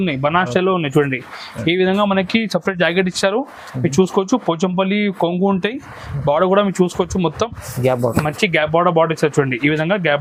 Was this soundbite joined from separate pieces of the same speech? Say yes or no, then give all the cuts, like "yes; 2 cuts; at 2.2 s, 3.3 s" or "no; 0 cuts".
no; 0 cuts